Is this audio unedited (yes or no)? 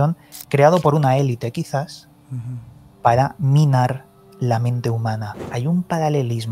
no